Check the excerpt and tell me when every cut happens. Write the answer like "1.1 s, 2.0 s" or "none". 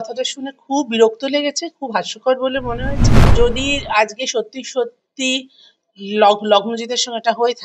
3.2 s

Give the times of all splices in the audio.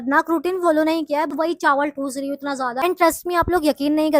1.3 s, 2.8 s

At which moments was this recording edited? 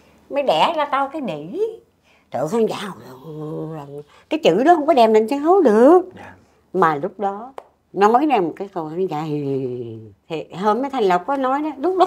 9.8 s

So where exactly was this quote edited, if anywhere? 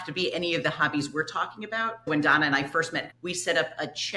2.1 s, 3.1 s

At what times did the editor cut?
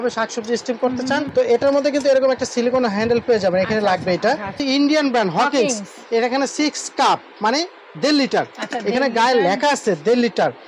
1.3 s, 4.6 s

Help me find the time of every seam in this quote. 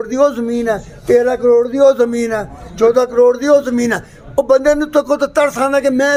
none

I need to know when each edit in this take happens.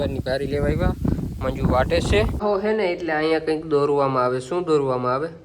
2.3 s

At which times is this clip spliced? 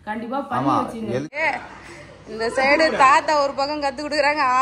1.3 s

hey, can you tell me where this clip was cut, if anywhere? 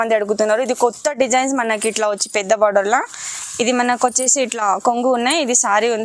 none

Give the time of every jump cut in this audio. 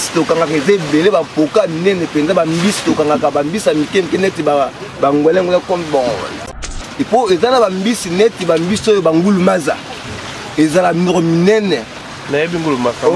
6.3 s

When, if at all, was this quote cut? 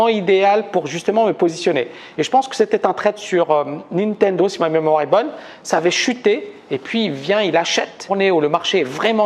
none

